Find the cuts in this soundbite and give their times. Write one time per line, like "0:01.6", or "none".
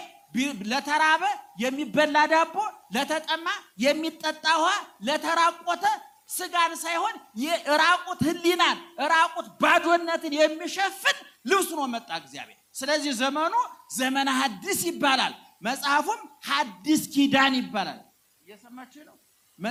none